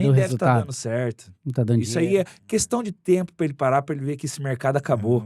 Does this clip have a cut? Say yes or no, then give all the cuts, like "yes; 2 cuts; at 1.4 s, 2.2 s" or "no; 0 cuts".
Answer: no; 0 cuts